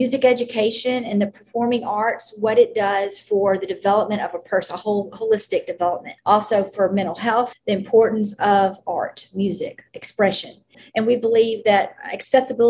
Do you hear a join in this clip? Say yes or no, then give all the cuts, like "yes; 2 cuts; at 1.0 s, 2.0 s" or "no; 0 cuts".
yes; 3 cuts; at 6.1 s, 7.6 s, 10.8 s